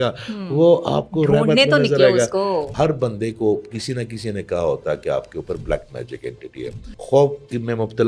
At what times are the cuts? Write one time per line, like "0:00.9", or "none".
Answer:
0:02.7
0:06.8